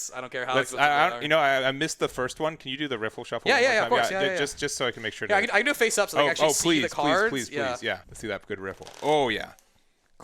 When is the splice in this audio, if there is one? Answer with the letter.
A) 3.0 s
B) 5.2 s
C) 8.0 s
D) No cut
C